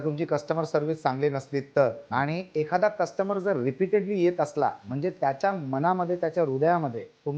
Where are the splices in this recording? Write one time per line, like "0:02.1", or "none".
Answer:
none